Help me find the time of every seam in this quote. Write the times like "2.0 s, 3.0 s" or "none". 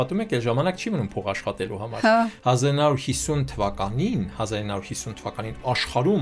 2.4 s